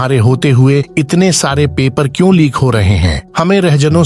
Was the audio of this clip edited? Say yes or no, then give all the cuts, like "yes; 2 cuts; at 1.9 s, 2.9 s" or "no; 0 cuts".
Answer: no; 0 cuts